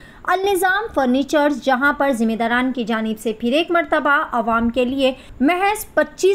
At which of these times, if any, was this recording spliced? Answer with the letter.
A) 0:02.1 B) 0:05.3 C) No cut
B